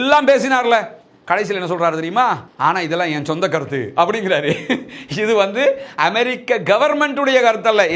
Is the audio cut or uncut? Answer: uncut